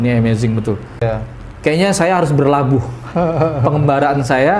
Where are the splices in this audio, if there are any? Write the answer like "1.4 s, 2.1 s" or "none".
1.0 s